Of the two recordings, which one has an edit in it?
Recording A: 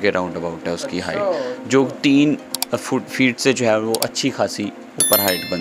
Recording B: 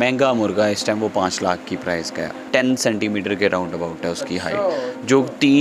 B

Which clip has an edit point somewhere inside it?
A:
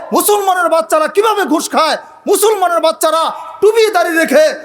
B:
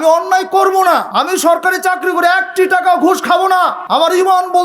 B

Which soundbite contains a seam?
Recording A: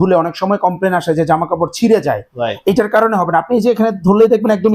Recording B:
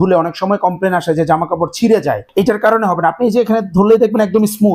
B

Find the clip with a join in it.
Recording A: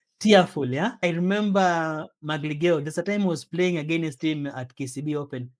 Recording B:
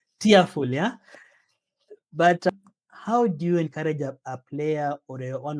A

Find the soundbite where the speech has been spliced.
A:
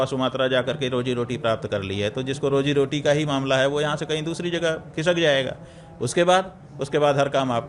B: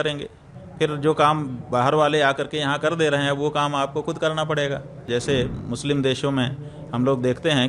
B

